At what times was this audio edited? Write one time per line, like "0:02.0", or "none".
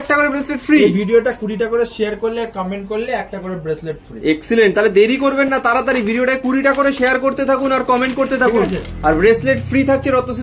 none